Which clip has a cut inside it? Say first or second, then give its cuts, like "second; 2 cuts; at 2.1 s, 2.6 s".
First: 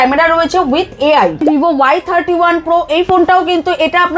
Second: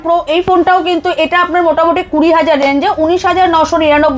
first; 1 cut; at 1.4 s